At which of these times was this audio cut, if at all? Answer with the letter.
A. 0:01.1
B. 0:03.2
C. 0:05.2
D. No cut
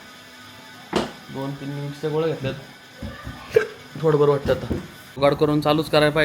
C